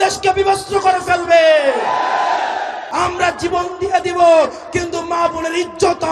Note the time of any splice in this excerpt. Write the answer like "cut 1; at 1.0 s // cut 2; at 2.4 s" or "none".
cut 1; at 2.8 s

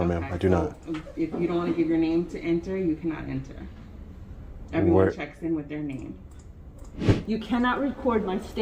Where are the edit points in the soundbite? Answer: cut 1; at 7.1 s

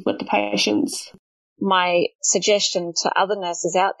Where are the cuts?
cut 1; at 1.1 s // cut 2; at 2.2 s

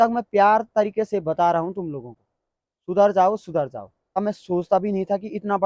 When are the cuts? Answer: cut 1; at 4.2 s

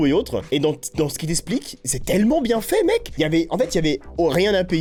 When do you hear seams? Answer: none

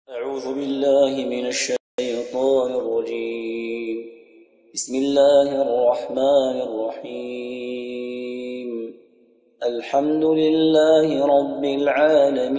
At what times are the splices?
cut 1; at 1.8 s

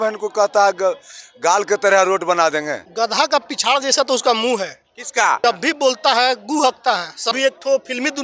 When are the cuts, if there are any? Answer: cut 1; at 2.8 s // cut 2; at 5.4 s // cut 3; at 7.3 s

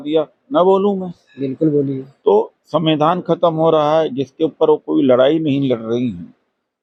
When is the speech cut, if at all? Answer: none

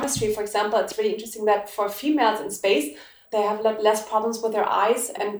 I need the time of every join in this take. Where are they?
cut 1; at 3.2 s

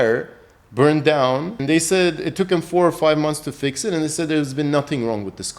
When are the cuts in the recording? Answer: cut 1; at 1.6 s

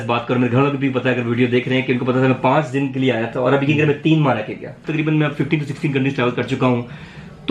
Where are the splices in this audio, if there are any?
cut 1; at 4.8 s

